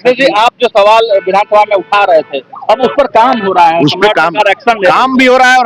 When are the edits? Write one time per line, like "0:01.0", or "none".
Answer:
none